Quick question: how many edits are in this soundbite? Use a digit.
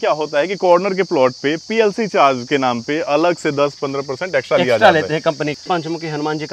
1